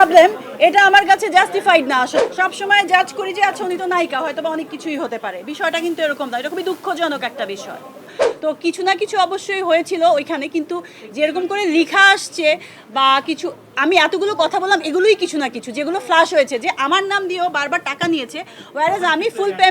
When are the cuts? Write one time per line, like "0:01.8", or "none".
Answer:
0:02.2
0:08.2